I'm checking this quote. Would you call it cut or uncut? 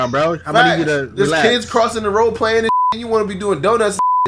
uncut